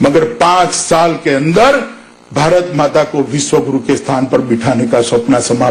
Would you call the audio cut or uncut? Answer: uncut